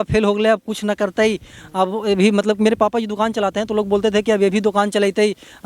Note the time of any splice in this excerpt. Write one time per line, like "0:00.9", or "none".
none